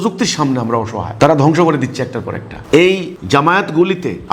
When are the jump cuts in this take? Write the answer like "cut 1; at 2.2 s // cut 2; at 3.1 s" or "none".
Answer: none